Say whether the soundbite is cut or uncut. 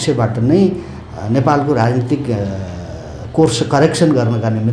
uncut